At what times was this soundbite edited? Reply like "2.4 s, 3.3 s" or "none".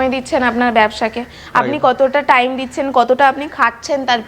none